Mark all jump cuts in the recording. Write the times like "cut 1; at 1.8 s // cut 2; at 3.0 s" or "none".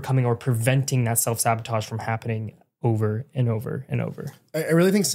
none